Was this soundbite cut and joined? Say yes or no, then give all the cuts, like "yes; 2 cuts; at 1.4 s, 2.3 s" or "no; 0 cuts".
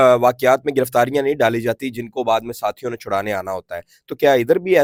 no; 0 cuts